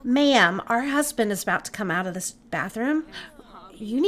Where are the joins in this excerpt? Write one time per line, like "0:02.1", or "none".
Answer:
none